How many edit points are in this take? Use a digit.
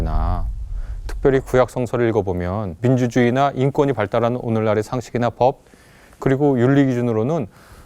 1